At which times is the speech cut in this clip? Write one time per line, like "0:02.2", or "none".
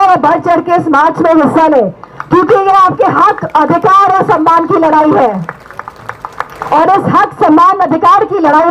none